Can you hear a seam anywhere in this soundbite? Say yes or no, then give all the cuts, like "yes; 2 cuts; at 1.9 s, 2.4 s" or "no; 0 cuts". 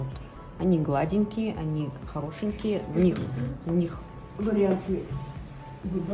no; 0 cuts